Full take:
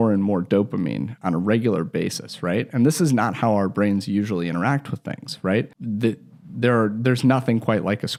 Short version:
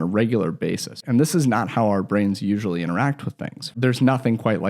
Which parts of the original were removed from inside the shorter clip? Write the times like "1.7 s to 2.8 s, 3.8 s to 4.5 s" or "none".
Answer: 2.3 s to 2.7 s, 5.4 s to 7.0 s

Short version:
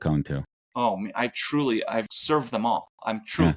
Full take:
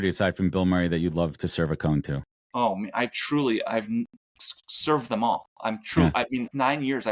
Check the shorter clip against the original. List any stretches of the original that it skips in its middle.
3.9 s to 4.7 s

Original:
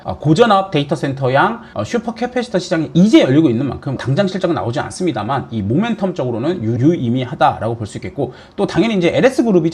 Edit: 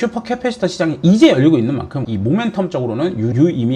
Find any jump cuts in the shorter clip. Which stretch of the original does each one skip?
4.0 s to 5.5 s

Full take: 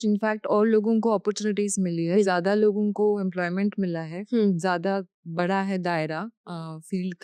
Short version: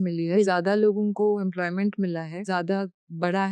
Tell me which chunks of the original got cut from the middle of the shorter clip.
4.2 s to 4.6 s

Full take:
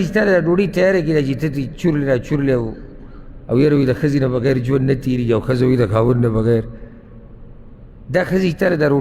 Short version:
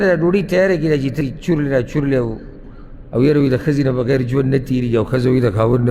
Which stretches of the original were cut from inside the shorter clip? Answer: 1.4 s to 1.5 s

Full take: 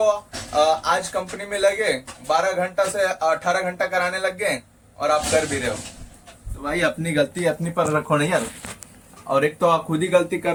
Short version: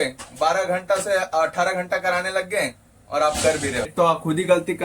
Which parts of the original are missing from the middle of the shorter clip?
5.8 s to 9.6 s

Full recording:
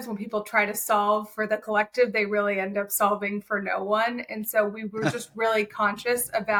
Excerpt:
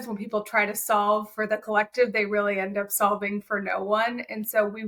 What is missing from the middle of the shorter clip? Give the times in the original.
none

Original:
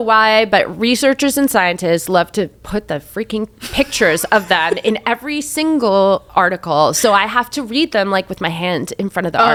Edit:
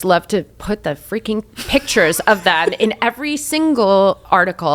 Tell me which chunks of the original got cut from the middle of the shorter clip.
none

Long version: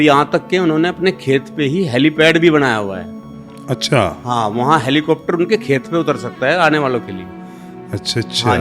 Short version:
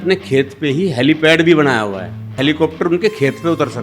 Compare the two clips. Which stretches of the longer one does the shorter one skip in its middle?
3.3 s to 4.8 s

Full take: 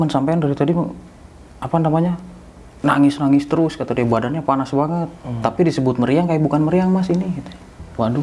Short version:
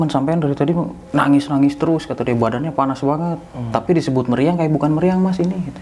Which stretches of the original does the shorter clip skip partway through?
1.0 s to 2.7 s

